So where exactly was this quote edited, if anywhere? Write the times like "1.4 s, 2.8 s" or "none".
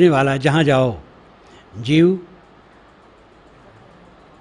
none